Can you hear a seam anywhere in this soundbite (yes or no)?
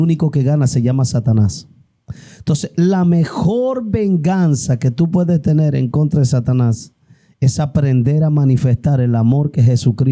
no